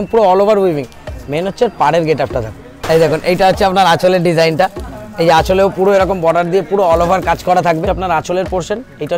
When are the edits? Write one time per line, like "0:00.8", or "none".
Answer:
0:02.7
0:07.9